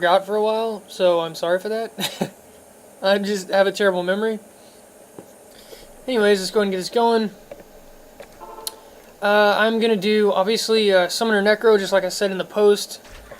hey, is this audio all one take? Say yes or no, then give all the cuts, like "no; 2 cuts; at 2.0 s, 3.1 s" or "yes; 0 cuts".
no; 1 cut; at 10.0 s